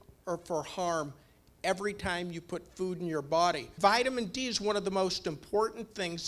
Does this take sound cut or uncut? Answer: cut